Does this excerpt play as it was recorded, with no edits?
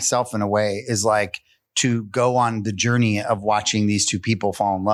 yes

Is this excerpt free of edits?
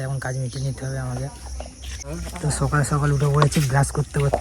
no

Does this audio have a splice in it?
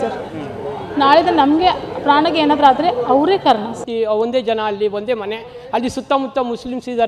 yes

